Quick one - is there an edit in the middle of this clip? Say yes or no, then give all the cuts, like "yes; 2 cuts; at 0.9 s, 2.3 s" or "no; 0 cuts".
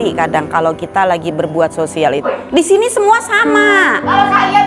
yes; 1 cut; at 2.2 s